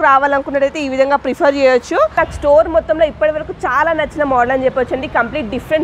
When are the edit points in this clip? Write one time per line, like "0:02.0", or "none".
0:02.1